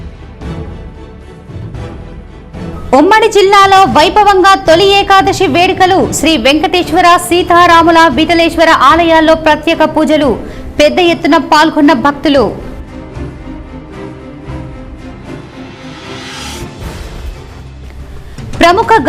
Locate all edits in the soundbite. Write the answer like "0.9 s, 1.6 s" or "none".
2.7 s